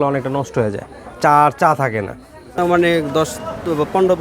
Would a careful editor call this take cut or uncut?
cut